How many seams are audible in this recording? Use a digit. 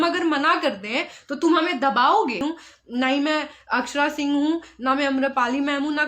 1